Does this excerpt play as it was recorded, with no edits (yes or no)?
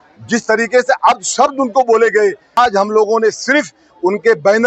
no